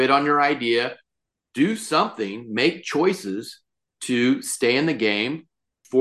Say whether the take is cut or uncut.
uncut